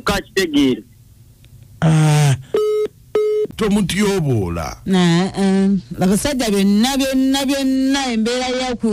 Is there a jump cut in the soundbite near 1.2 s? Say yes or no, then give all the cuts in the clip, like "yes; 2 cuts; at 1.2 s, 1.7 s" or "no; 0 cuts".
no; 1 cut; at 3.5 s